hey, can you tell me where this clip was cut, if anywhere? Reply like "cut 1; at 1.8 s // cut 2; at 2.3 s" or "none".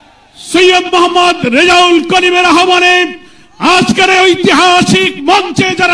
none